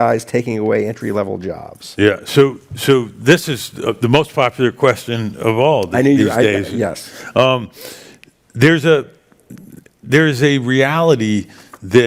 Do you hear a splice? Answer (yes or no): no